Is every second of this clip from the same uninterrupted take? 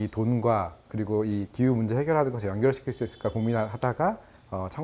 yes; 0 cuts

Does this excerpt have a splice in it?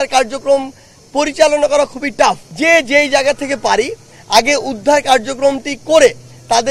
yes; 1 cut; at 2.5 s

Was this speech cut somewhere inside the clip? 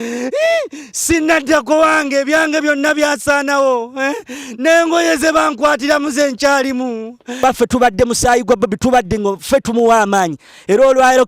yes; 1 cut; at 7.4 s

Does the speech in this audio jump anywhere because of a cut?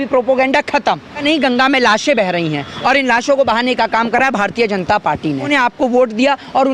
yes; 2 cuts; at 1.2 s, 5.5 s

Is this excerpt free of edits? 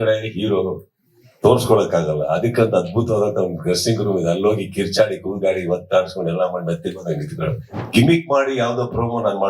no; 1 cut; at 7.7 s

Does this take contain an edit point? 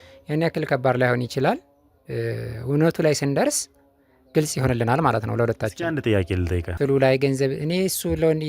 yes; 1 cut; at 6.7 s

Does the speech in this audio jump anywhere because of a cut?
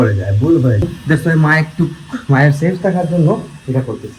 yes; 1 cut; at 0.9 s

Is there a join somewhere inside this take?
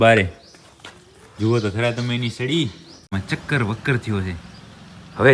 yes; 1 cut; at 3.1 s

